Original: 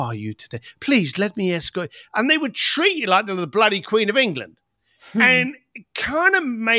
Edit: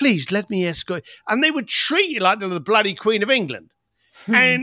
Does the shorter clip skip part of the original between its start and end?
no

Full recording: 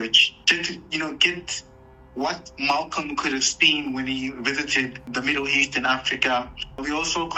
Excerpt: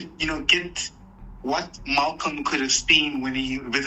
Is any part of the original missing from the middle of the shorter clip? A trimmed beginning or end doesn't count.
no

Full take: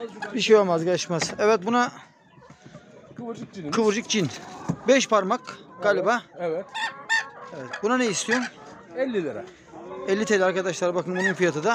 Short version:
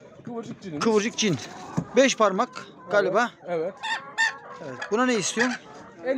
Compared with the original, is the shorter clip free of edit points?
yes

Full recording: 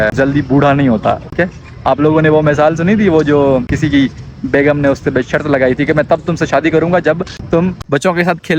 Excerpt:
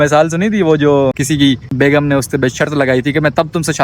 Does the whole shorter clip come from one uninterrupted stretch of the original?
no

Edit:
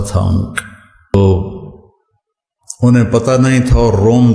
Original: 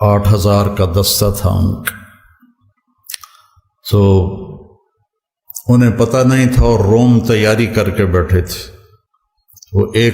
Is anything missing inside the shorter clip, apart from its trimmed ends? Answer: yes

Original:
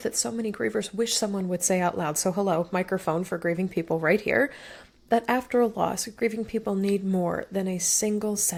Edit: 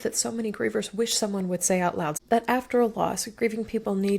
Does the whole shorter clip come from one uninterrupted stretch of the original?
no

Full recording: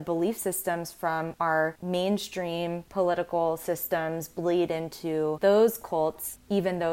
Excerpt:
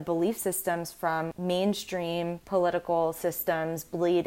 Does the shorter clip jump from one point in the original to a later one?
yes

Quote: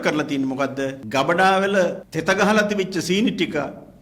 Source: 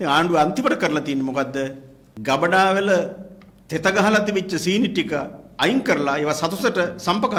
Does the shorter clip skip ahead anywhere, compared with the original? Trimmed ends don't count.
yes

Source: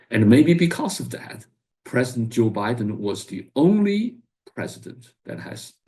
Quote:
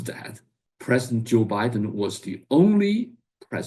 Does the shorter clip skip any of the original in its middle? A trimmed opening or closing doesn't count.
no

